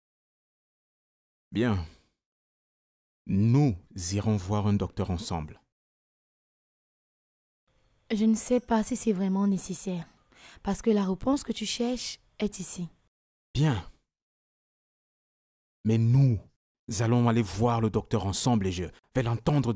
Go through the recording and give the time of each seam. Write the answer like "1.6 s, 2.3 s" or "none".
none